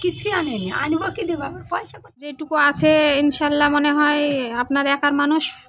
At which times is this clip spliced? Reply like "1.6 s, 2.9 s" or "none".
2.4 s